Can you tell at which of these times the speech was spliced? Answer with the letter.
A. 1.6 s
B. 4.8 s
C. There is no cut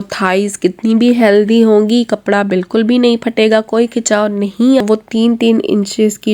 B